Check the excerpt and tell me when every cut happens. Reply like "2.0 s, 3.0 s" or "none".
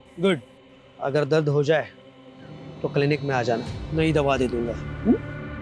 none